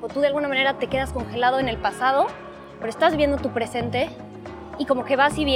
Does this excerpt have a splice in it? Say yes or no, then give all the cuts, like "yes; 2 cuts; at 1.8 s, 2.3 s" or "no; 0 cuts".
no; 0 cuts